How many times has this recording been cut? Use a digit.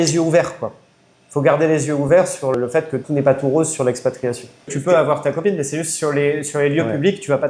2